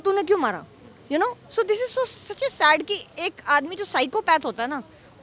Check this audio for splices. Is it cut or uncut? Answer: uncut